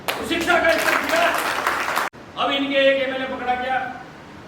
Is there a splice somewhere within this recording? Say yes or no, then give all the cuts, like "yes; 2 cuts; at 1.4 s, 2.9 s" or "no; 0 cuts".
yes; 1 cut; at 2.1 s